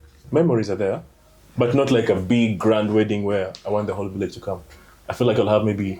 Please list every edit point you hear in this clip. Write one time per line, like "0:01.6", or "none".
none